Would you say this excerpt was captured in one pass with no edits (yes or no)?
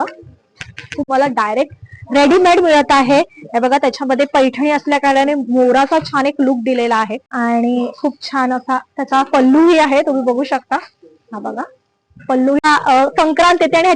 no